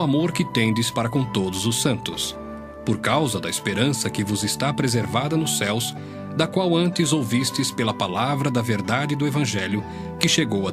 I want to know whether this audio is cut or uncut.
cut